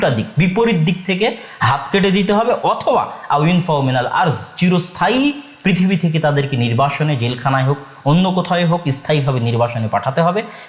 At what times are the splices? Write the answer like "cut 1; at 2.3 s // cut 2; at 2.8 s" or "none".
none